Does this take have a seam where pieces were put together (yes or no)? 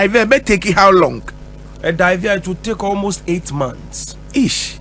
no